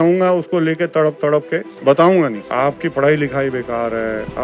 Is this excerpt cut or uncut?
cut